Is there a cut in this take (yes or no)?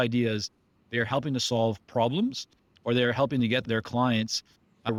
no